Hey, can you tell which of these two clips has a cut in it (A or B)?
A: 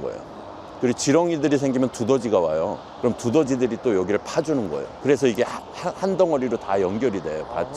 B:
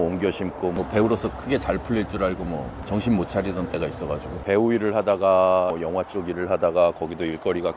B